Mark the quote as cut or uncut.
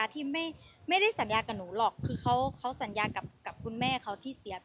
uncut